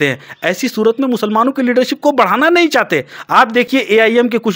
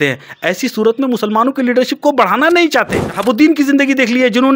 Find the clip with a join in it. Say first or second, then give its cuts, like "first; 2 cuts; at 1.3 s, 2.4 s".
second; 1 cut; at 3.0 s